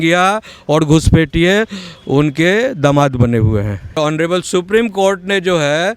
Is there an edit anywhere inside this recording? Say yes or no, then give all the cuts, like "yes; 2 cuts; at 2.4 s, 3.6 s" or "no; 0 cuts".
yes; 1 cut; at 4.0 s